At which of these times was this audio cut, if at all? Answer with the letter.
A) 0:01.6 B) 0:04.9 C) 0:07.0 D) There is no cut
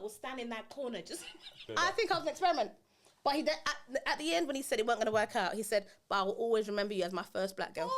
A